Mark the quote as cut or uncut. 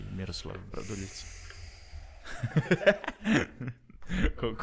uncut